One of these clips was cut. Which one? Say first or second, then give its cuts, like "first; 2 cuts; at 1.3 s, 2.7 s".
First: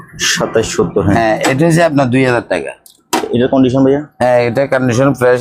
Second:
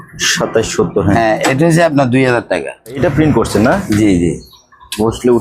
second; 1 cut; at 3.0 s